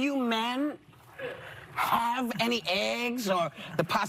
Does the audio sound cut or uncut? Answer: uncut